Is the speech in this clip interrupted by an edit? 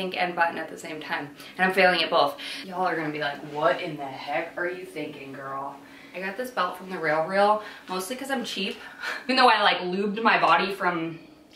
yes; 3 cuts; at 2.5 s, 6.0 s, 9.1 s

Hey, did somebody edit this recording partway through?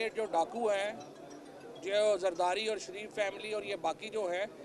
no; 0 cuts

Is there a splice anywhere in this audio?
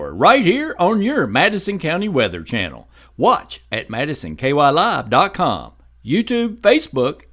no; 0 cuts

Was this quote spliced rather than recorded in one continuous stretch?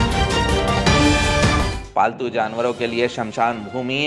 yes; 1 cut; at 1.8 s

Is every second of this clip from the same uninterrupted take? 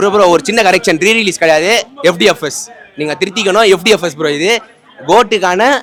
yes; 0 cuts

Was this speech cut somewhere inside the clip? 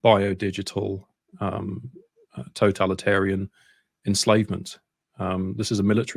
no; 0 cuts

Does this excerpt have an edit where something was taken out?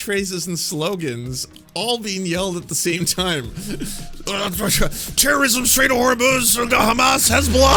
no; 0 cuts

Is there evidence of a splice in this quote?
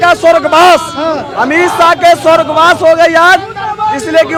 no; 0 cuts

